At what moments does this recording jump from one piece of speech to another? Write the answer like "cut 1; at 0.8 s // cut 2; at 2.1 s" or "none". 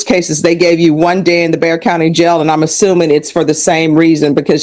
none